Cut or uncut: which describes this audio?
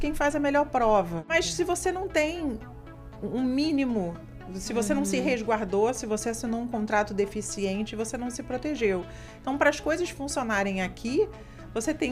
cut